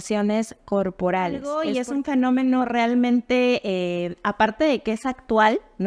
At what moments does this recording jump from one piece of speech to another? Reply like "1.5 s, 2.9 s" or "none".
1.5 s

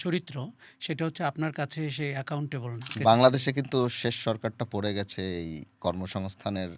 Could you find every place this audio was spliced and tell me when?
3.0 s

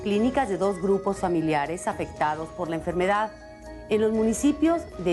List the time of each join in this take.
2.7 s

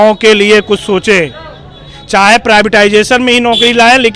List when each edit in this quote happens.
none

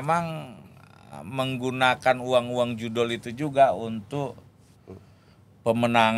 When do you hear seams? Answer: none

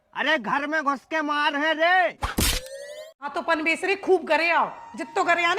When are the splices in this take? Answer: 3.3 s

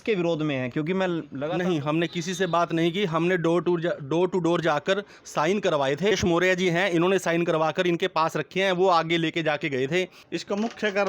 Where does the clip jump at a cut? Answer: 1.3 s, 6.1 s, 10.2 s

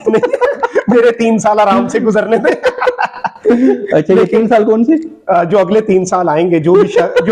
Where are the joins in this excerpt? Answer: none

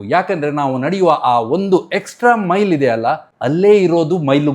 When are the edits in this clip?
3.3 s

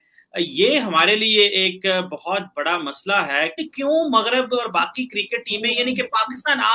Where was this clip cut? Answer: 3.5 s

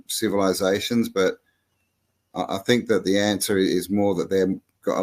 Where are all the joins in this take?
none

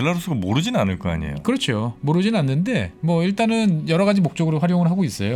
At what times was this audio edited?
none

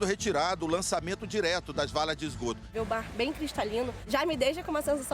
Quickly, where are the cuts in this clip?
2.7 s, 4.0 s

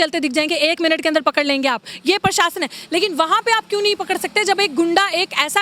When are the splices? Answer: none

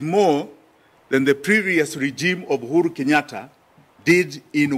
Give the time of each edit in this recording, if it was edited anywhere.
none

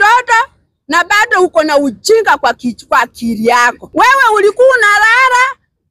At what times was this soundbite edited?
3.8 s

